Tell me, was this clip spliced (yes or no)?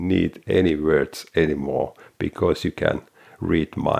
no